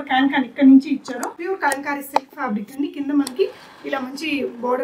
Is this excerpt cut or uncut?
cut